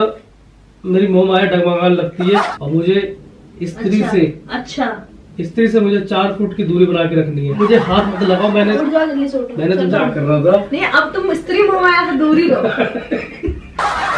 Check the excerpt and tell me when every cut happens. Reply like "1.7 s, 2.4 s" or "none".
2.5 s, 7.6 s, 9.9 s